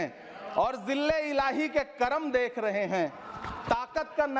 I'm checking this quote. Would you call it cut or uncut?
uncut